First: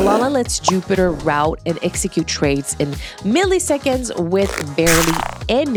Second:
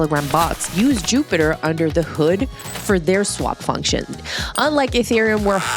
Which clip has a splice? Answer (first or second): second